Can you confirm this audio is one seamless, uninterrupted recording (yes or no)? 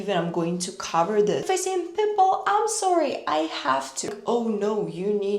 no